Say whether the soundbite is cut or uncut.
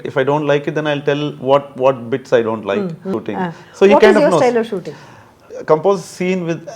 cut